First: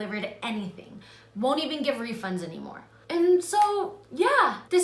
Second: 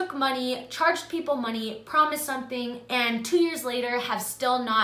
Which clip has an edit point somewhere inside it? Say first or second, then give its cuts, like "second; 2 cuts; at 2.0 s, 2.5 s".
first; 1 cut; at 2.9 s